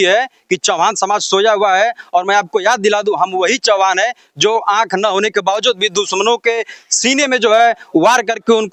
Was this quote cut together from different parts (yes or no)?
no